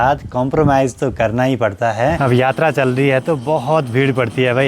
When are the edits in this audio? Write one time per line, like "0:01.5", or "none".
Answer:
0:02.2